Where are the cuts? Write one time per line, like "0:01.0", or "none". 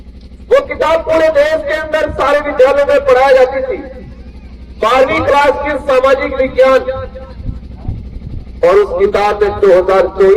none